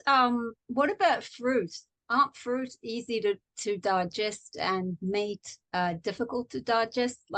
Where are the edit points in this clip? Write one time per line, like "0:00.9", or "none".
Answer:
0:05.5